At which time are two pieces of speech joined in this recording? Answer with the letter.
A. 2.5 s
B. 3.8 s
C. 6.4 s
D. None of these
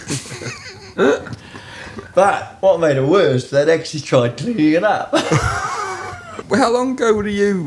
C